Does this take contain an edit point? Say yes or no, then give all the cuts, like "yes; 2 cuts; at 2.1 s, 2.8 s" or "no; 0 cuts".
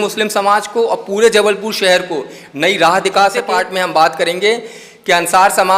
yes; 1 cut; at 3.4 s